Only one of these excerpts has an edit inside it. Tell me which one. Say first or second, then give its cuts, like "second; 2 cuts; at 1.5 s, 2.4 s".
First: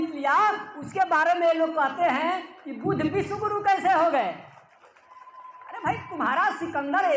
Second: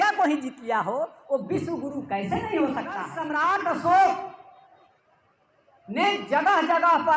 second; 1 cut; at 3.2 s